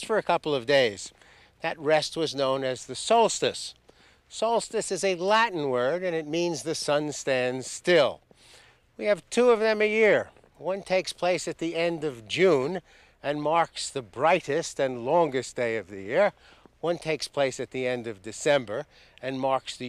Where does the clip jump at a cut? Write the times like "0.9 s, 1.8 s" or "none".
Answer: none